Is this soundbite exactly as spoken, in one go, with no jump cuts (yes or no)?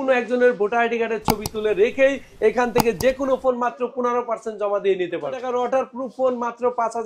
no